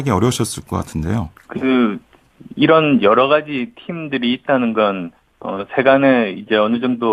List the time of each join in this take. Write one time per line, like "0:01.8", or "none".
0:01.4